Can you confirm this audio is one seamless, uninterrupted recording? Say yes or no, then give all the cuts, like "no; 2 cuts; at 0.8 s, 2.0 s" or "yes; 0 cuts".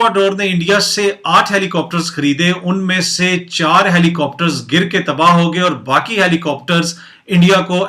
yes; 0 cuts